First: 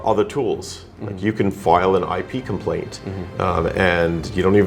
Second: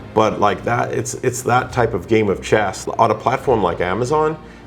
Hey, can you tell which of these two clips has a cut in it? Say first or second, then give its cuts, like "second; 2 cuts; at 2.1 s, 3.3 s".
second; 1 cut; at 2.8 s